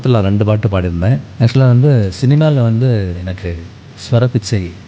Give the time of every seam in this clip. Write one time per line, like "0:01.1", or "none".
0:01.3